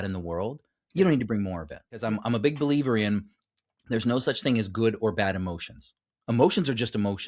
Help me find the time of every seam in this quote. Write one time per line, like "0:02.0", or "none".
0:02.0